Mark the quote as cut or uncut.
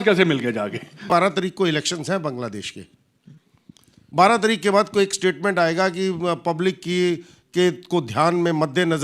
cut